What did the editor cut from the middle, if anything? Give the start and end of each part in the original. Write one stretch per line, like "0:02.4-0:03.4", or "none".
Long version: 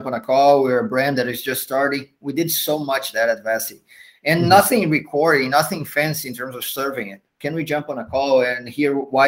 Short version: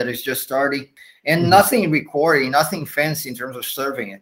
0:02.1-0:03.9